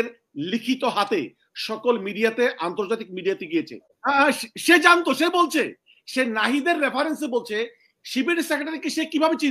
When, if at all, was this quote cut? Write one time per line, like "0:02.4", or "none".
0:03.9